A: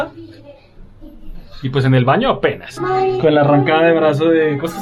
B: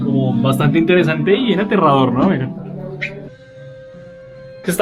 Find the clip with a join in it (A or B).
B